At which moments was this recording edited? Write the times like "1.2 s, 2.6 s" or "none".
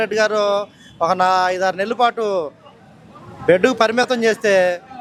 none